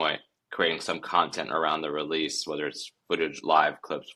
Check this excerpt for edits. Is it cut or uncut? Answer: uncut